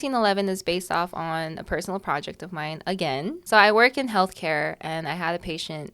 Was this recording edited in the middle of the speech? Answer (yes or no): yes